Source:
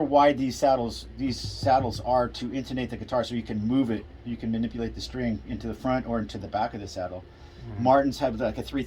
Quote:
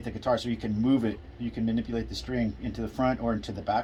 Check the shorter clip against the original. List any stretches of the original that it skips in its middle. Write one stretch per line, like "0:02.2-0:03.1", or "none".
none